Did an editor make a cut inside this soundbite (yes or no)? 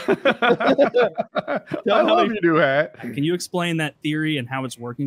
yes